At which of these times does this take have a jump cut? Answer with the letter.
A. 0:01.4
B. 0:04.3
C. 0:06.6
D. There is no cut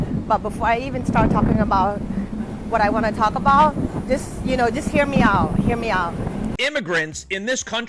C